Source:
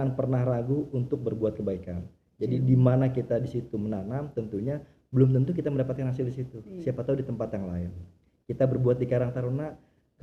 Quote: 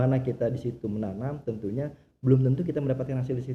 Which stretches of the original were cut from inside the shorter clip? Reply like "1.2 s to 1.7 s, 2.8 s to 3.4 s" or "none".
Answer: none